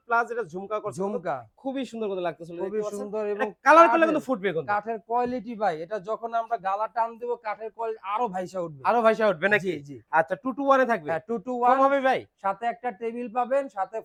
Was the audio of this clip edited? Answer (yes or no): no